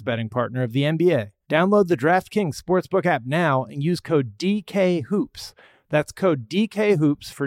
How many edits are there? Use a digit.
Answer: 1